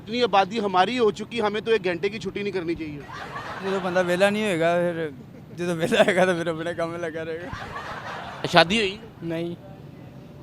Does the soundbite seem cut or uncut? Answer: cut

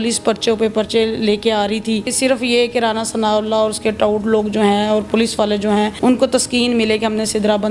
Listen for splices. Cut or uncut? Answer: cut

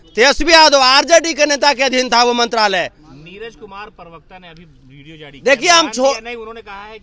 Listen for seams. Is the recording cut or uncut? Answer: uncut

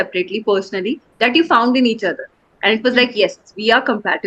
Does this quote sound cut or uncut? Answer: uncut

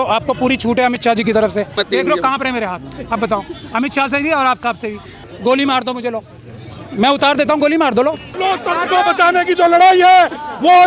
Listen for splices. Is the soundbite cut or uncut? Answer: cut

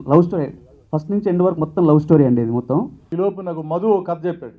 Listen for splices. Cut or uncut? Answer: cut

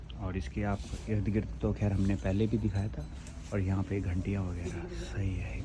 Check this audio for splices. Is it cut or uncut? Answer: uncut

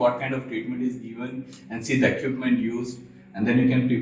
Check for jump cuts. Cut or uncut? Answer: uncut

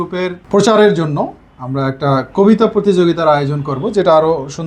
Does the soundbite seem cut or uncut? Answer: uncut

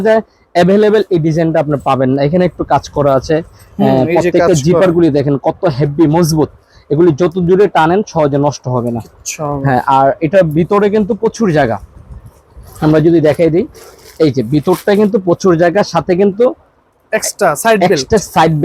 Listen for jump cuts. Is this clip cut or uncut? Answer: uncut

